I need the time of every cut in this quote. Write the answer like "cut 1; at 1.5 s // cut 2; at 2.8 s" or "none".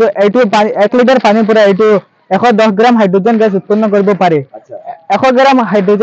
none